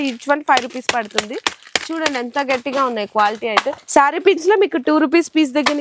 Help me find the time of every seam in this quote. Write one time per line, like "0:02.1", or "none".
0:03.8